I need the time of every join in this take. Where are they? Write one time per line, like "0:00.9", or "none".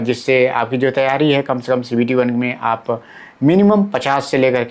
none